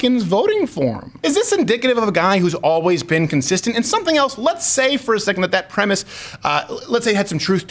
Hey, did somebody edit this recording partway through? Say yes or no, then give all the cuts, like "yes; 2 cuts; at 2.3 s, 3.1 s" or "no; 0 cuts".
yes; 1 cut; at 1.1 s